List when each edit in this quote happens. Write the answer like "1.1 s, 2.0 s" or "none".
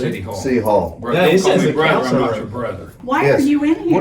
3.0 s